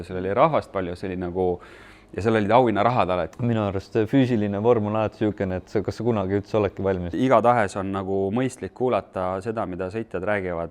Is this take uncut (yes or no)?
no